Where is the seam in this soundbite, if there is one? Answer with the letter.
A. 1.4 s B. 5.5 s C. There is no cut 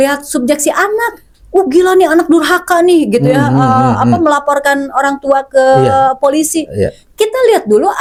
C